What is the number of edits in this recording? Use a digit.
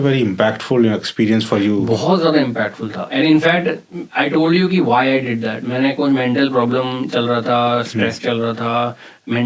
0